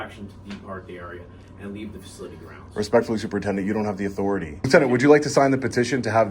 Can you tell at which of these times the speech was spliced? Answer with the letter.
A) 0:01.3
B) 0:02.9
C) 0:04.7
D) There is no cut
C